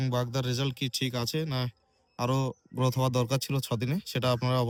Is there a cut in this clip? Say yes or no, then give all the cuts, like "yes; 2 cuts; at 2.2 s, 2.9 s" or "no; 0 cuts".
no; 0 cuts